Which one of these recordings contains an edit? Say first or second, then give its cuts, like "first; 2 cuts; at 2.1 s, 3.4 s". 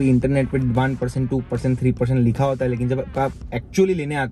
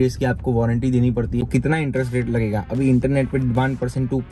second; 1 cut; at 1.5 s